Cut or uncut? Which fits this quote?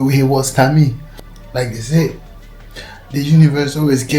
cut